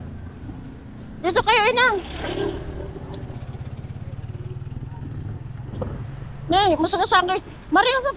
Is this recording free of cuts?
yes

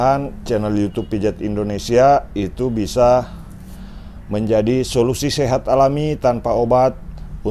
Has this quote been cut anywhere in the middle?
no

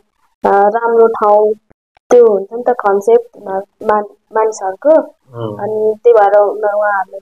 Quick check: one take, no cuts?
yes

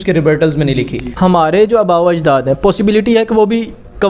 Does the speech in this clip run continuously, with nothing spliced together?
no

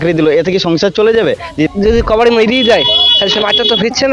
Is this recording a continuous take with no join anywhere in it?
no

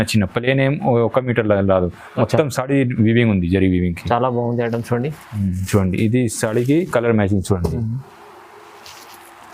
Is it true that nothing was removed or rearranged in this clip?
yes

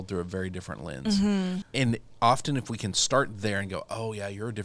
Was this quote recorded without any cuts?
no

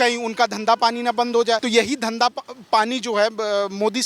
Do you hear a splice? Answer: yes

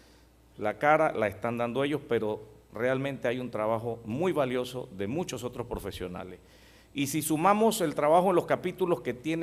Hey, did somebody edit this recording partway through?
yes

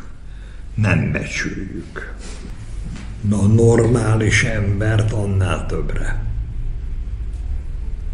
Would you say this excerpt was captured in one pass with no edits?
no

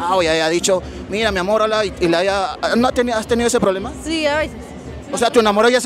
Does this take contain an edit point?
no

